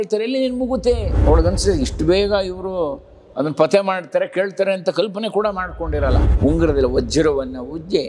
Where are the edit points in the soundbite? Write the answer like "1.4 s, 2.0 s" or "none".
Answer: 1.1 s, 6.2 s